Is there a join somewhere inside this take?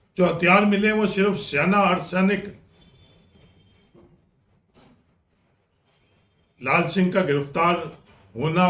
yes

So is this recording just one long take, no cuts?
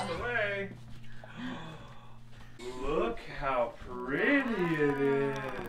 no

